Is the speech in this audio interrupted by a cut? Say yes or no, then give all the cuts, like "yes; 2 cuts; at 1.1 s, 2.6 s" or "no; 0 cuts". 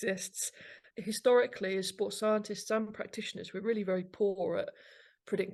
no; 0 cuts